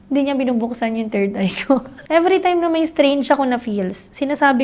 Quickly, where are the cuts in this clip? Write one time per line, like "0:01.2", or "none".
0:01.9

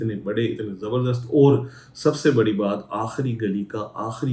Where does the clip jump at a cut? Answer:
none

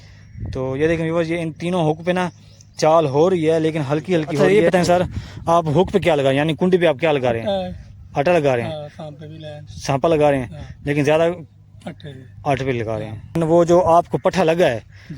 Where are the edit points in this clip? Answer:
0:04.4
0:13.4

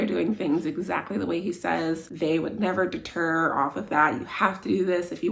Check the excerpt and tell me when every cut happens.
0:02.1

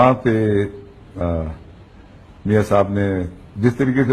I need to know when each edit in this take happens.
0:01.2

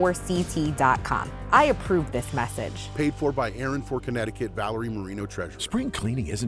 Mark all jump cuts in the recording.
0:05.5

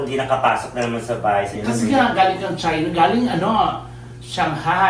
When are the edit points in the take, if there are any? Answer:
0:01.5

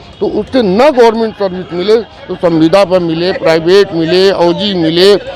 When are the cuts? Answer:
none

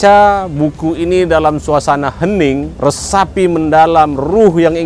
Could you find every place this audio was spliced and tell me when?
0:02.7

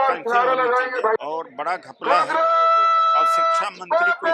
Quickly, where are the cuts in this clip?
0:01.2

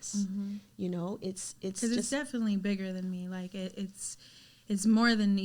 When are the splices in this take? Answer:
none

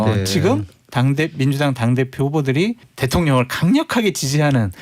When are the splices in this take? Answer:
0:02.9

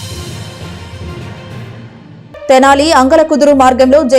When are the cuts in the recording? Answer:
0:01.9

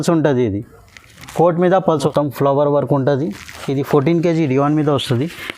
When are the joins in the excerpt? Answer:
0:02.1

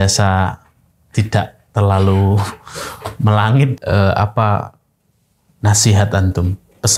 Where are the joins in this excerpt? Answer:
0:03.7

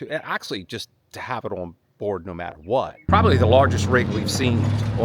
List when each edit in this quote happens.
0:03.0

